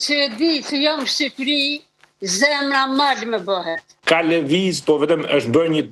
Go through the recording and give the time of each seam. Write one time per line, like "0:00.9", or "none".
0:03.9